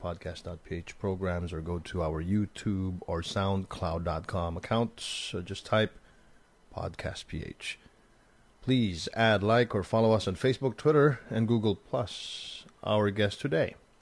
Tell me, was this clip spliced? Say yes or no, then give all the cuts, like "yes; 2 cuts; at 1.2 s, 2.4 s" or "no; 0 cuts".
yes; 1 cut; at 2.2 s